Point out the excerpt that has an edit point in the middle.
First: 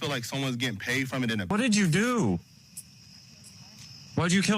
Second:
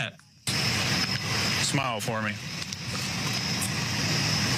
first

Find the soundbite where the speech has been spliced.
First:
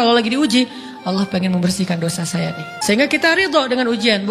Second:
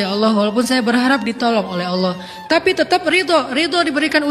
first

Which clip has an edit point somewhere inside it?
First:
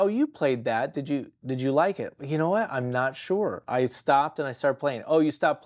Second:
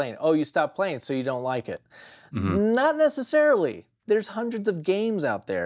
second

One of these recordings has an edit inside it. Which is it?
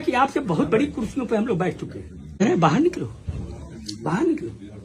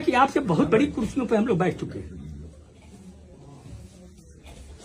first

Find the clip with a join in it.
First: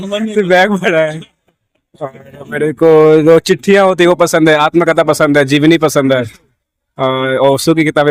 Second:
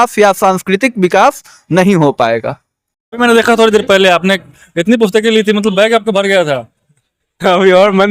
second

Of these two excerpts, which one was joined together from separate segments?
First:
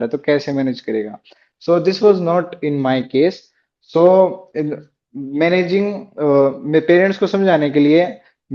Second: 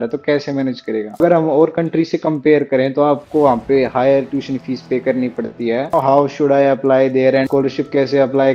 second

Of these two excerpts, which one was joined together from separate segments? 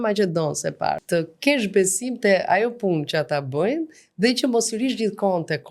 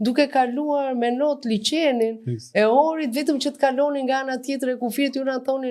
first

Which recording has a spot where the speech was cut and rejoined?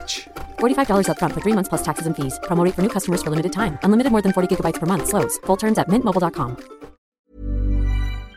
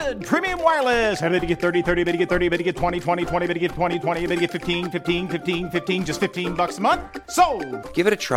first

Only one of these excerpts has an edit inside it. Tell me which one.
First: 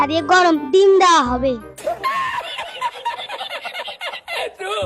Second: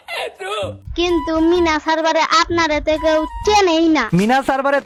first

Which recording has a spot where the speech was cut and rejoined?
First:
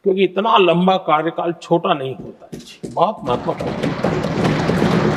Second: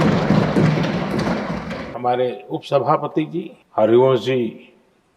second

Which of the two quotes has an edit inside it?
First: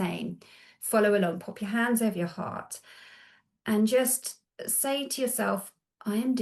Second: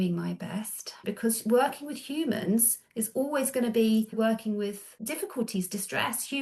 second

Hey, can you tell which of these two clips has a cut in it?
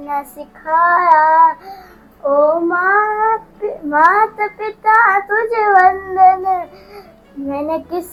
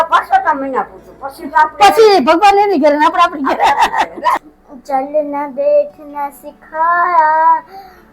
second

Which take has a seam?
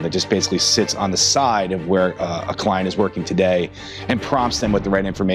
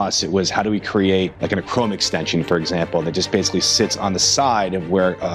second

